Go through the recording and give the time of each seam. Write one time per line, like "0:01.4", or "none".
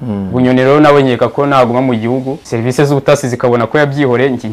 0:02.4